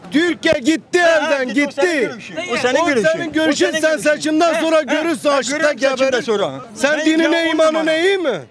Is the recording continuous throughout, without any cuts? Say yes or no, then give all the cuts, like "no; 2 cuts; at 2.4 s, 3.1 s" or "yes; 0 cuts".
no; 1 cut; at 6.7 s